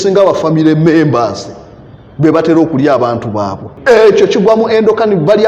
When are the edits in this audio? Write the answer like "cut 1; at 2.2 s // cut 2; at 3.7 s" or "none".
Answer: cut 1; at 3.7 s